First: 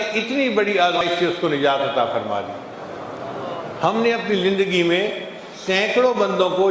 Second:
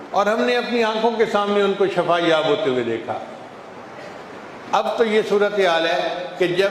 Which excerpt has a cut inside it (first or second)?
first